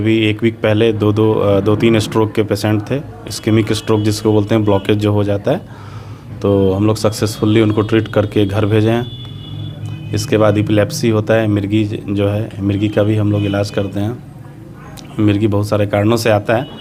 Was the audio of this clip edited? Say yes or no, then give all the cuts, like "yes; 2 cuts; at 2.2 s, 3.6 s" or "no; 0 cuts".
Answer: no; 0 cuts